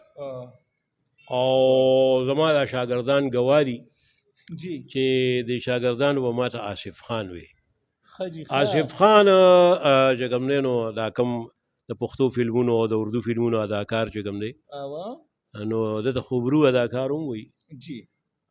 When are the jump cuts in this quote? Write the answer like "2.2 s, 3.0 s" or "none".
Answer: none